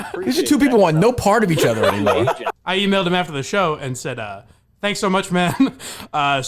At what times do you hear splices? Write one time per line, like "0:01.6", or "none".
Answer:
0:02.5